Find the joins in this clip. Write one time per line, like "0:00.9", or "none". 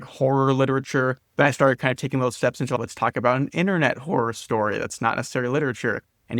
0:02.8

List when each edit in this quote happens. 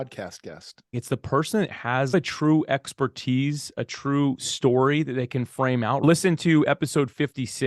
0:01.0
0:02.1
0:06.0

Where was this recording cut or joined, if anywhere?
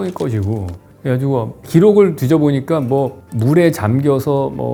none

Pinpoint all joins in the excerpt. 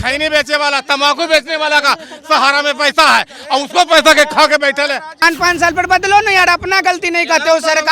0:05.1

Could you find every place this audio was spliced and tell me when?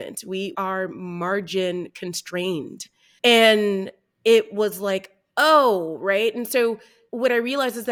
none

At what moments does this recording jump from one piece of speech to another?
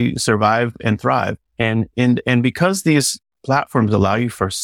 none

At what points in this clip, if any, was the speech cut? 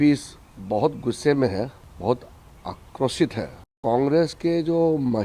0:01.8
0:03.8

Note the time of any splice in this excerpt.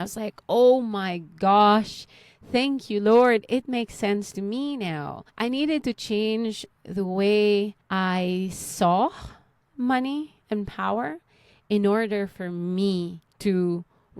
0:05.2
0:07.8
0:13.2

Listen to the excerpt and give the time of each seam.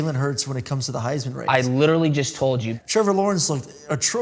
0:02.7

